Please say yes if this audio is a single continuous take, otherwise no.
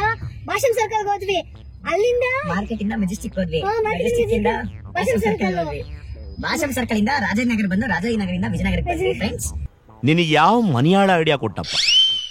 yes